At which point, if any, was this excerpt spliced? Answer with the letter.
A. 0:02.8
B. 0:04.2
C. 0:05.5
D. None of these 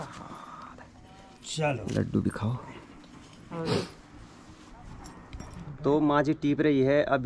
C